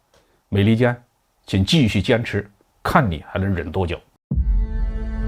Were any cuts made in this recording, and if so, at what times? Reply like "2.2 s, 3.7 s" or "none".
4.1 s